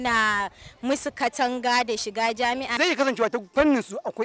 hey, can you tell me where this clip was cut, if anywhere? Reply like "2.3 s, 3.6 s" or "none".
2.8 s